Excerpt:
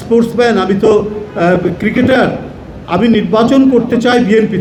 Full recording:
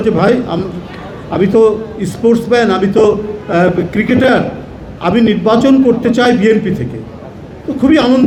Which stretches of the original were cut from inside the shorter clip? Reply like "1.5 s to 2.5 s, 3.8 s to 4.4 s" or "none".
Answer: none